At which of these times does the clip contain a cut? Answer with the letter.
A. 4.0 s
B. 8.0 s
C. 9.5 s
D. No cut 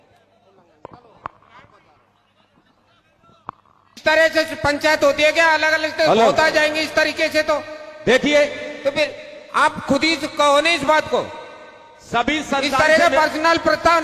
A